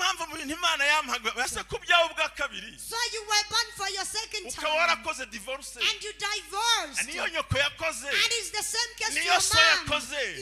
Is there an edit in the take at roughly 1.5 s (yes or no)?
yes